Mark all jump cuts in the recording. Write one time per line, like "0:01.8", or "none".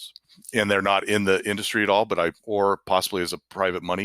0:02.4